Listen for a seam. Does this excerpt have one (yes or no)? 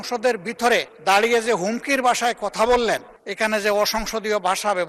yes